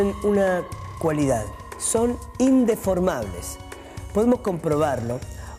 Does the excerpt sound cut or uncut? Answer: cut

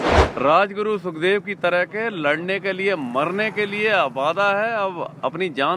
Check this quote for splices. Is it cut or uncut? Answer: uncut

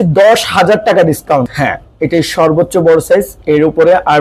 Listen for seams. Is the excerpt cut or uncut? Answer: cut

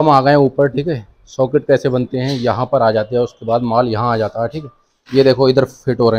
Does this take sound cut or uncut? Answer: uncut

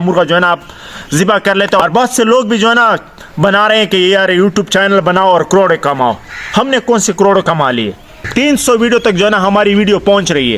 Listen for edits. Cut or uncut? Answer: cut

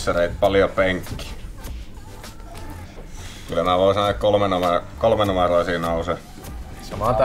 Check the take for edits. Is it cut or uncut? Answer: cut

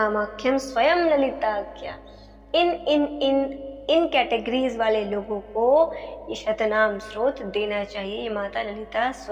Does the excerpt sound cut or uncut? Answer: uncut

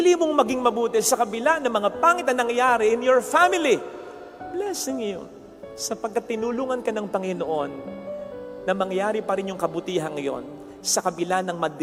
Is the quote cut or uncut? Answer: uncut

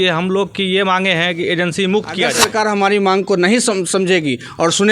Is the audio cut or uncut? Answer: cut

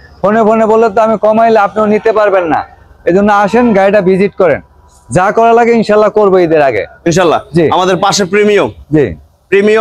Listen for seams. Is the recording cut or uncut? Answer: uncut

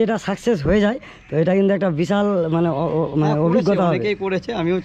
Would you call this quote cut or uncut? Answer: uncut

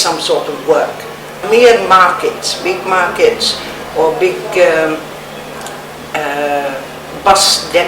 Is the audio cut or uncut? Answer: cut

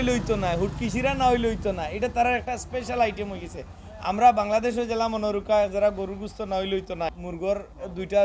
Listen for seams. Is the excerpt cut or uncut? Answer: cut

